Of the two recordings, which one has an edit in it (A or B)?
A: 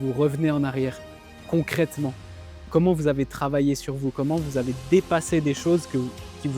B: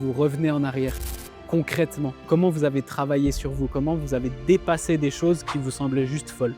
B